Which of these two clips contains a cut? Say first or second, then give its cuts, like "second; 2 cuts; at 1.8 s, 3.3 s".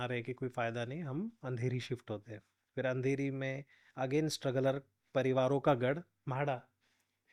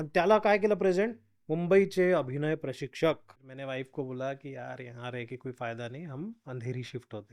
second; 1 cut; at 3.3 s